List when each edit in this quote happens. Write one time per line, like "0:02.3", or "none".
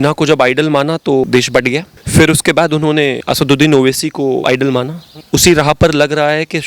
0:01.2
0:03.2
0:04.4